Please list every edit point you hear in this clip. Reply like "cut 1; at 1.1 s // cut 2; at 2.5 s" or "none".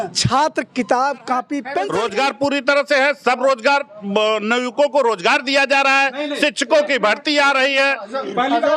cut 1; at 1.8 s